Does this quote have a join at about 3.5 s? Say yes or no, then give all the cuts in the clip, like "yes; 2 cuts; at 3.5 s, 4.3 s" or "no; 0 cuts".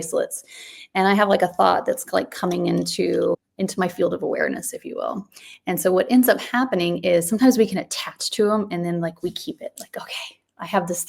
yes; 1 cut; at 3.5 s